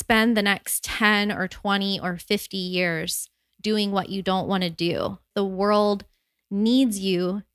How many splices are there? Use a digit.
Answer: 1